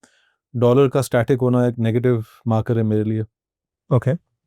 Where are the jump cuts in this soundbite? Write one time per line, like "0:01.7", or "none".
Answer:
none